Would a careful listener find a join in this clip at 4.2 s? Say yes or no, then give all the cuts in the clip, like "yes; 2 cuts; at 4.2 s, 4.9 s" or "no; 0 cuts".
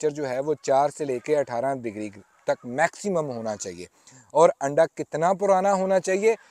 no; 0 cuts